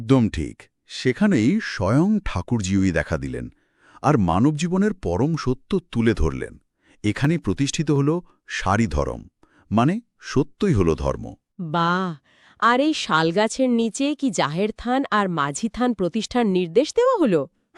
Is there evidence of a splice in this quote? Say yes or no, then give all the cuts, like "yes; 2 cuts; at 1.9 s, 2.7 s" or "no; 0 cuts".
no; 0 cuts